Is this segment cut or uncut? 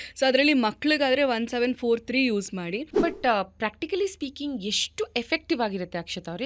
cut